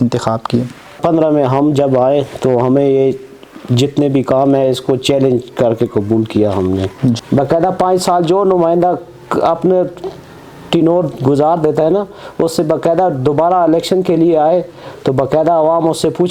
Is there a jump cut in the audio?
yes; 2 cuts; at 1.0 s, 7.2 s

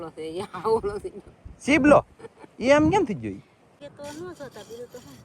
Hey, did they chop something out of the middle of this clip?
yes; 1 cut; at 3.8 s

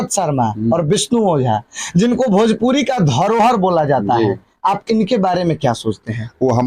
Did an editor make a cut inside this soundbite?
no; 0 cuts

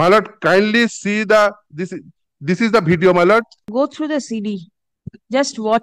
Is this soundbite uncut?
no; 1 cut; at 3.6 s

